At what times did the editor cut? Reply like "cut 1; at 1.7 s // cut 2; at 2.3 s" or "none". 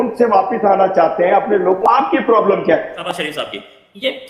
cut 1; at 1.8 s // cut 2; at 3.1 s